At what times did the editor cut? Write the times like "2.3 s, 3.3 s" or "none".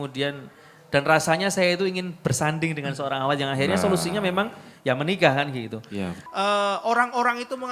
6.2 s